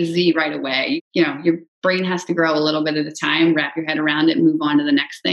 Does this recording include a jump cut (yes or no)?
yes